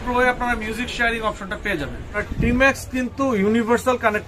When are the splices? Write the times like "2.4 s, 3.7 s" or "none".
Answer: 2.2 s